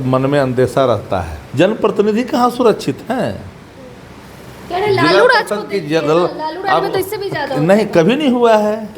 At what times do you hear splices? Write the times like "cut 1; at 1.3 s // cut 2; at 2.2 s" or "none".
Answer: cut 1; at 1.4 s